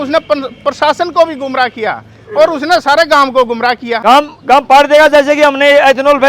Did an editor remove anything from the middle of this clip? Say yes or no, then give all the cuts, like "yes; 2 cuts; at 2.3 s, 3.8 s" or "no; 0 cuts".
yes; 1 cut; at 4.0 s